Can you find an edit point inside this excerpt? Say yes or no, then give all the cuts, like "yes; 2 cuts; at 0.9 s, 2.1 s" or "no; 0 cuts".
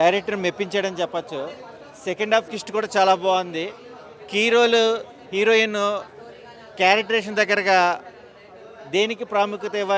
no; 0 cuts